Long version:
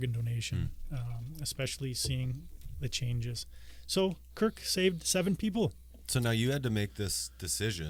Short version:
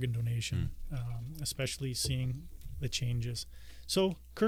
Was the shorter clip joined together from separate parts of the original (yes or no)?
no